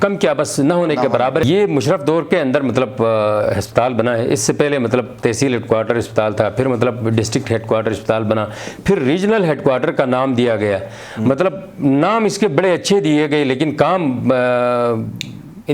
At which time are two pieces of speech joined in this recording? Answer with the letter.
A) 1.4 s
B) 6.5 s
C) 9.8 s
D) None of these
A